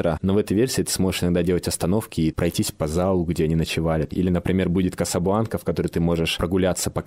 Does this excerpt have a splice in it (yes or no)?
yes